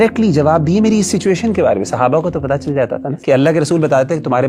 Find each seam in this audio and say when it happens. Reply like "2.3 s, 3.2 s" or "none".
3.1 s